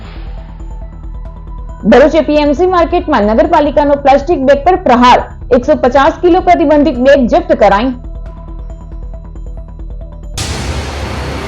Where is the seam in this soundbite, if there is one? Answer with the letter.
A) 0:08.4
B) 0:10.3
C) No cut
B